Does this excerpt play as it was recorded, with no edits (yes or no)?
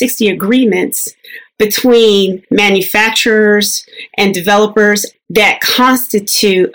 no